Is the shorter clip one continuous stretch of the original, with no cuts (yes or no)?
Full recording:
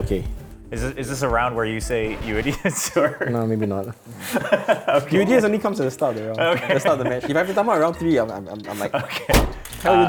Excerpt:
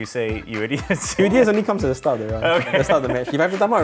no